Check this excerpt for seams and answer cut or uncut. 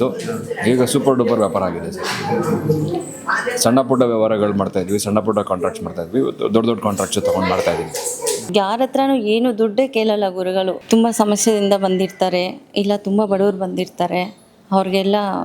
cut